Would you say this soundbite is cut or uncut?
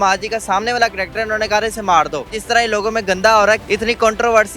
cut